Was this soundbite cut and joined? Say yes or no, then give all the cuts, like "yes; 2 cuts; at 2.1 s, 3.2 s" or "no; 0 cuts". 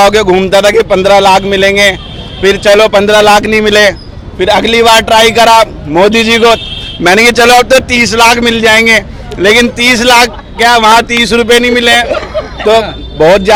no; 0 cuts